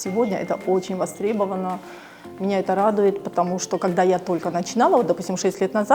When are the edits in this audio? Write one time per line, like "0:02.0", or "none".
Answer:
none